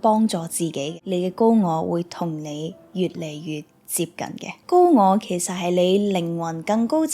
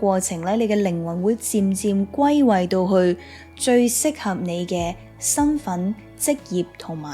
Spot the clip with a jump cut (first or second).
first